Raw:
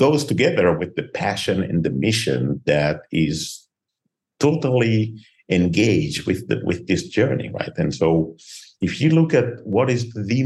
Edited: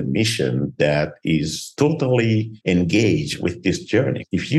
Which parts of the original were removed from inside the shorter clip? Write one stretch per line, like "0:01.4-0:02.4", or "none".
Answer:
0:03.5-0:04.2
0:05.1-0:05.4
0:06.6-0:08.2